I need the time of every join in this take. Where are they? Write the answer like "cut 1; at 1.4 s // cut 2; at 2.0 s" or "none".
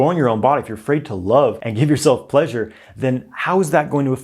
cut 1; at 1.6 s